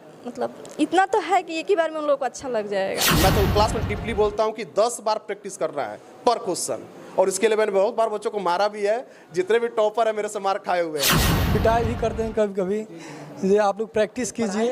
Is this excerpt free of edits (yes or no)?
no